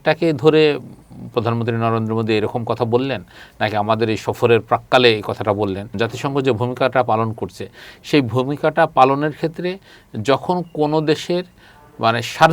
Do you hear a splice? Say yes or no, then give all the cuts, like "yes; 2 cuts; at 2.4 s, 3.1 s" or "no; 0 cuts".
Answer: yes; 1 cut; at 6.0 s